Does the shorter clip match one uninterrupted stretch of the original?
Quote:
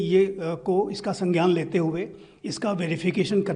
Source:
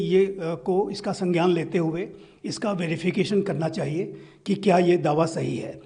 yes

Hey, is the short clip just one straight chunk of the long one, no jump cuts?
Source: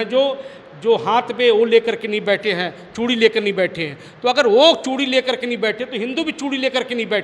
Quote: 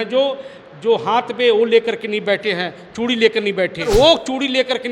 no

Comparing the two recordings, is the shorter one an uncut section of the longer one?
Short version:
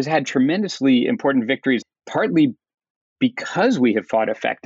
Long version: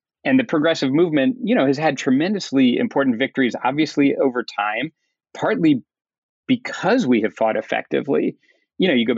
no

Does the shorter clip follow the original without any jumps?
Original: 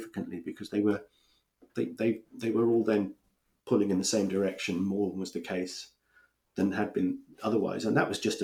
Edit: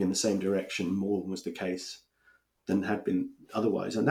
yes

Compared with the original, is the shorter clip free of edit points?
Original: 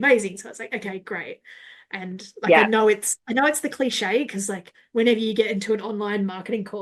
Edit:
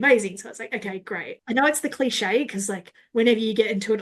no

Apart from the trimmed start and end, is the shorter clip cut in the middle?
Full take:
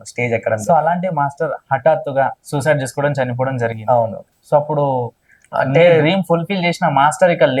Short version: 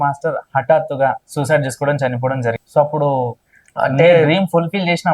yes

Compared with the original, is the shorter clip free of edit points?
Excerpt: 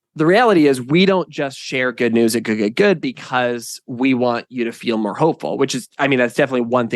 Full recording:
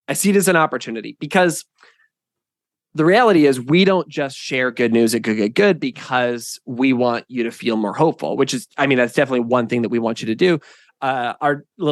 yes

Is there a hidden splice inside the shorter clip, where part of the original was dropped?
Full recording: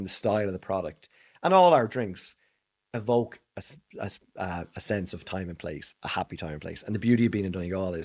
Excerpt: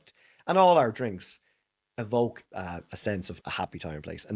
yes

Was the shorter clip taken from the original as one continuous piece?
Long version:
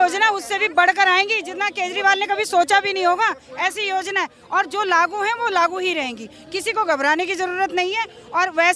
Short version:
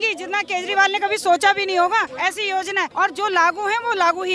no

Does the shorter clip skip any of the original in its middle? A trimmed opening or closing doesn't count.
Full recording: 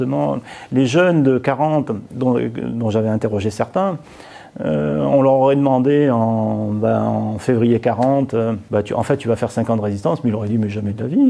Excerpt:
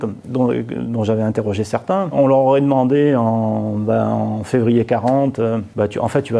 yes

